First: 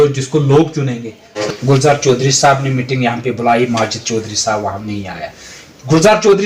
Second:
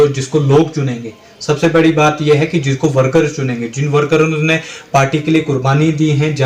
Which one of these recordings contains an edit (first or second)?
first